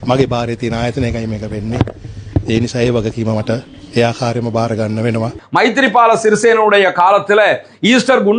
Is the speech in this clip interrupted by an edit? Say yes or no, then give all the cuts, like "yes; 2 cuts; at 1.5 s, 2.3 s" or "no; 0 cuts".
yes; 1 cut; at 5.4 s